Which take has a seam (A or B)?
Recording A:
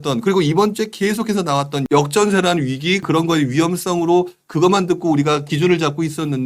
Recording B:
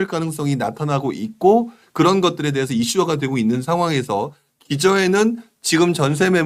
A